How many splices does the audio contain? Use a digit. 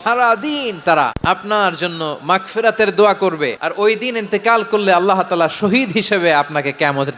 2